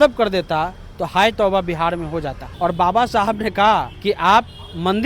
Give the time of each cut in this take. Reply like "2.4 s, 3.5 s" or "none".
2.4 s, 3.9 s

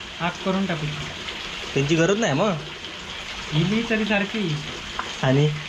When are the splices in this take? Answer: 1.1 s

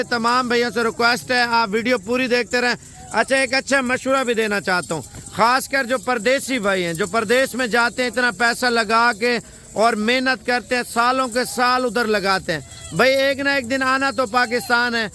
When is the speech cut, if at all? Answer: none

